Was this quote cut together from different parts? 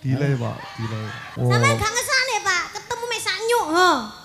yes; 1 cut; at 1.2 s

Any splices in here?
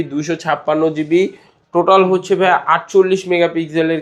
no; 0 cuts

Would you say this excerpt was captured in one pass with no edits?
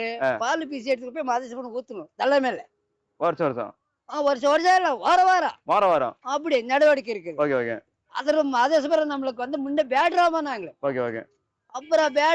yes; 0 cuts

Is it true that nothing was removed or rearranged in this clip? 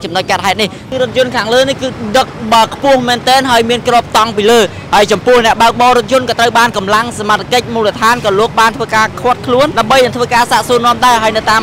no; 2 cuts; at 0.9 s, 9.7 s

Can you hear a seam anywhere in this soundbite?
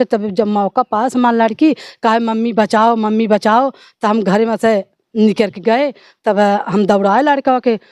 no; 0 cuts

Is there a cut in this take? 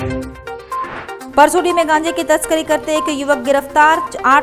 yes; 1 cut; at 1.2 s

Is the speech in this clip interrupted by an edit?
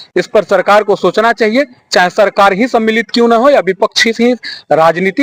no; 0 cuts

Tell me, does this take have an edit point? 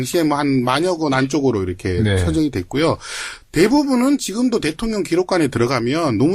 yes; 1 cut; at 4.3 s

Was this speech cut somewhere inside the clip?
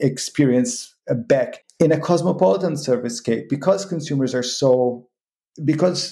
yes; 1 cut; at 1.6 s

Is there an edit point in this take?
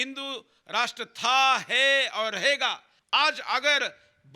yes; 1 cut; at 2.9 s

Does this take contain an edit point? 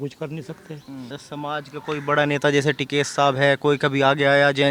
yes; 1 cut; at 1.2 s

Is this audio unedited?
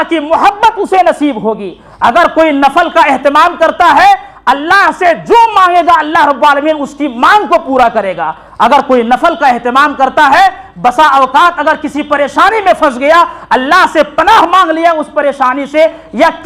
yes; 0 cuts

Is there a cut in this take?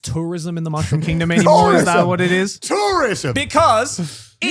no; 0 cuts

